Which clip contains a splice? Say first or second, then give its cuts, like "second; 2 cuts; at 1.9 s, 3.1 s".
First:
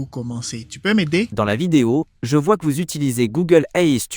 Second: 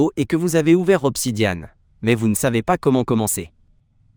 first; 1 cut; at 1.3 s